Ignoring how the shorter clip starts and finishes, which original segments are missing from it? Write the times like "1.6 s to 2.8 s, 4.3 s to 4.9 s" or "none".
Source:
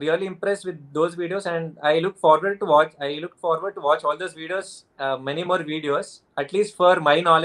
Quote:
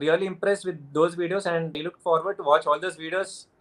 1.7 s to 3.1 s